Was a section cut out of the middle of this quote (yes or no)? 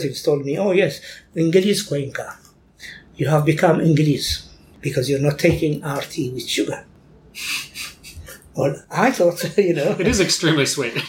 yes